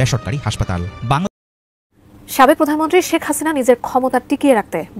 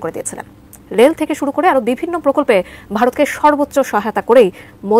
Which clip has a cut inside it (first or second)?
first